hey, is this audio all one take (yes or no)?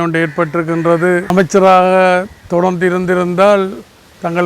no